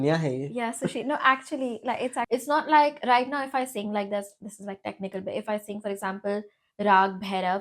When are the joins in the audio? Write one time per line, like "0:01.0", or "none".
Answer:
0:02.3